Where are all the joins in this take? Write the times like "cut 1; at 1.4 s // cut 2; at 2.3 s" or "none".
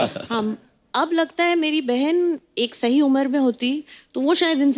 none